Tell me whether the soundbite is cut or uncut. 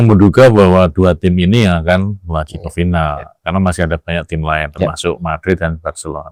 uncut